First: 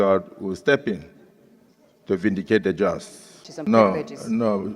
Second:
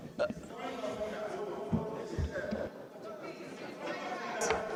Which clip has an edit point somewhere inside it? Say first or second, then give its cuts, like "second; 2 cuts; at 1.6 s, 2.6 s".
first; 1 cut; at 3.4 s